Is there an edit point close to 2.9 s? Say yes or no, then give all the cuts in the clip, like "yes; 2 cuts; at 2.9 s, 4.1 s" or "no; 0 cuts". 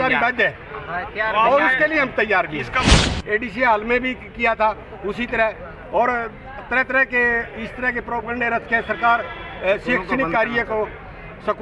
yes; 1 cut; at 2.9 s